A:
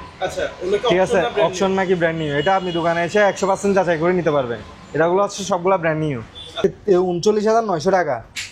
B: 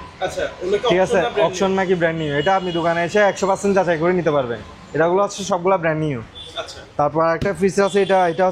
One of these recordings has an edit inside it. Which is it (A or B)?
A